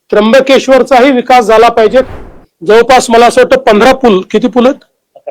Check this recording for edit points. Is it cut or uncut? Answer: cut